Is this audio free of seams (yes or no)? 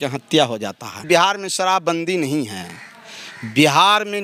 no